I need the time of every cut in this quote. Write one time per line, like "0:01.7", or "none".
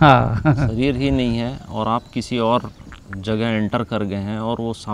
none